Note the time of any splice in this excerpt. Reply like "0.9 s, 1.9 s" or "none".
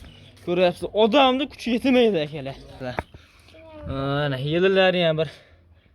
2.8 s